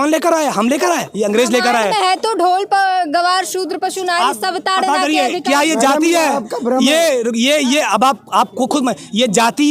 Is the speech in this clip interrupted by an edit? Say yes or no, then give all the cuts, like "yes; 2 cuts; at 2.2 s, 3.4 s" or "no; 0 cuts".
no; 0 cuts